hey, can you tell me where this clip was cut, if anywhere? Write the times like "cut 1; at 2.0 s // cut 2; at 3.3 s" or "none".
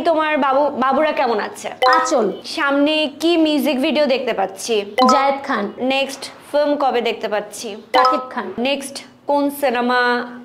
cut 1; at 5.8 s // cut 2; at 8.6 s